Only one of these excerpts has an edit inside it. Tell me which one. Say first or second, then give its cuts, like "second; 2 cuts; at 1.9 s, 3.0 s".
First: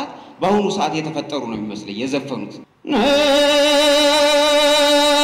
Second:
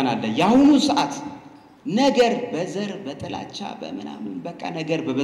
first; 1 cut; at 2.7 s